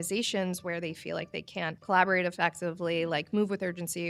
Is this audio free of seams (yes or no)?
yes